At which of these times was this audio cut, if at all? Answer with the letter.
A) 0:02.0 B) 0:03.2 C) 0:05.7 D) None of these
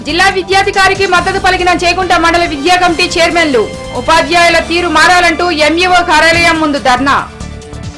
D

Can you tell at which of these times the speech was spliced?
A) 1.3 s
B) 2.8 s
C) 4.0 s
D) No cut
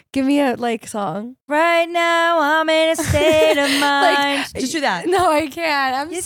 A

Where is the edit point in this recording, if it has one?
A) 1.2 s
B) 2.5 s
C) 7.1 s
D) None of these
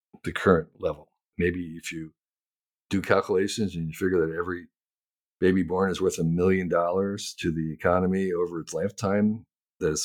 A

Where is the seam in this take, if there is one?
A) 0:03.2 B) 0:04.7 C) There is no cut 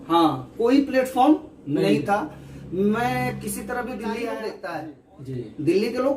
B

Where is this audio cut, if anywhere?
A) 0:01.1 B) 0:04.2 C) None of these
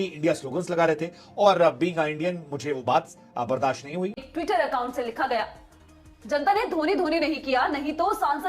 B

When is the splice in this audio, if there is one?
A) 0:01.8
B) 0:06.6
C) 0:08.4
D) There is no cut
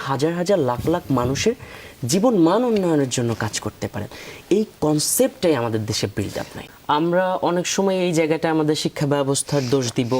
B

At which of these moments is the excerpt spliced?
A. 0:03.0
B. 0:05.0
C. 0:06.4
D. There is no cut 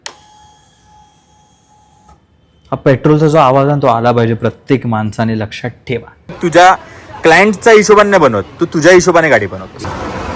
C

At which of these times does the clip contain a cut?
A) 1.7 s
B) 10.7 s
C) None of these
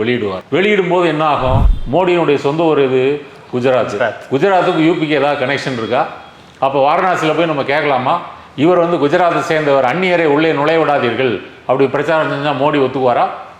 A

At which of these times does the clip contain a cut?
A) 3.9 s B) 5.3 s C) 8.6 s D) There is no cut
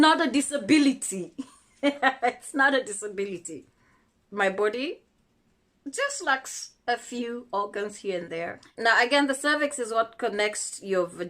C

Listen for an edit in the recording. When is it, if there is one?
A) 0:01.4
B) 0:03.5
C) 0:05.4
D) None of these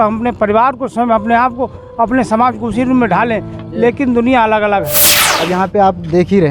C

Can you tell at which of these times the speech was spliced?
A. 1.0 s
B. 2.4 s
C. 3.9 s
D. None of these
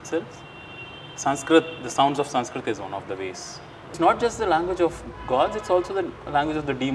C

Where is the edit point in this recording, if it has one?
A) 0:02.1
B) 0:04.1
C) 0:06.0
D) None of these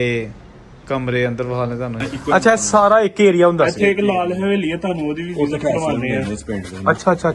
A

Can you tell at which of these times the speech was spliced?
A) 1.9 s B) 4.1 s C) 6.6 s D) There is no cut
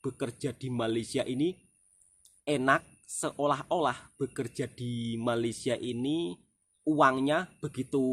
D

